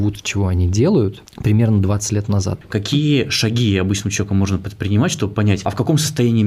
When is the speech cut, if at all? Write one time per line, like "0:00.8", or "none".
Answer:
0:01.3
0:02.5
0:05.6